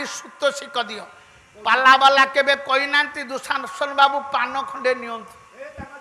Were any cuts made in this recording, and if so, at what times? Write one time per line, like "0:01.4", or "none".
none